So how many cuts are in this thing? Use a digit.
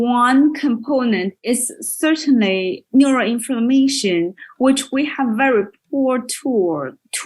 1